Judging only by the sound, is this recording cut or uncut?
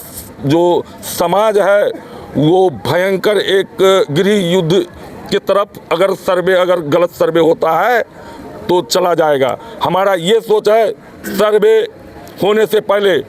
uncut